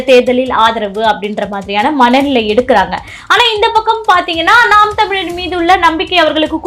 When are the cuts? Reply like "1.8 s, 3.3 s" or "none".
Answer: none